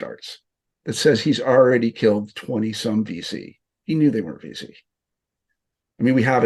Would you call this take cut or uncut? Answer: uncut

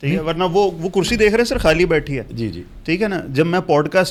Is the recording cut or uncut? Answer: uncut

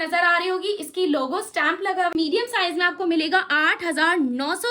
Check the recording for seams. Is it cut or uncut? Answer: cut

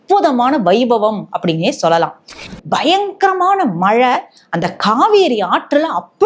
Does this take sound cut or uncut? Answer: cut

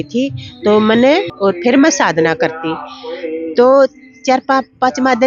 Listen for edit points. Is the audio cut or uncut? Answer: cut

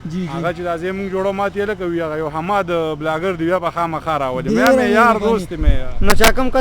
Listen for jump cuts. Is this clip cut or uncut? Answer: uncut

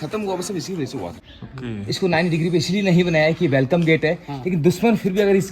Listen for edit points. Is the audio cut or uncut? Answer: cut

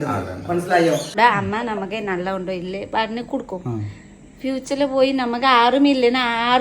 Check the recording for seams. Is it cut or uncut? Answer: cut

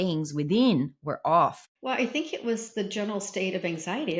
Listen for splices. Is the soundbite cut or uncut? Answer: cut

